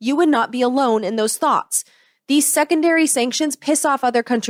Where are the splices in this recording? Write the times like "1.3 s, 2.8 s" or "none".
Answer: none